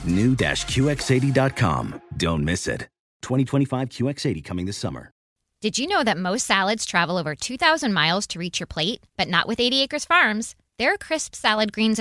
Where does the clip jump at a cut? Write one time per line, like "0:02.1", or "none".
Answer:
0:05.3